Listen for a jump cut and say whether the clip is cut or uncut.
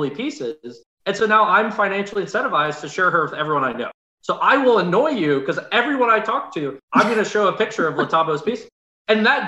uncut